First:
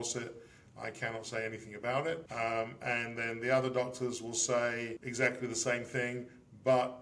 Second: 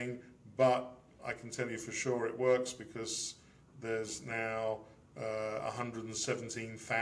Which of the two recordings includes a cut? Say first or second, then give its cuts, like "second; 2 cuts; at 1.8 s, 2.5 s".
first; 2 cuts; at 2.3 s, 5.0 s